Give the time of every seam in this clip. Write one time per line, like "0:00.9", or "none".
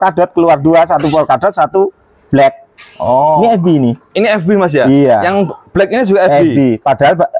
none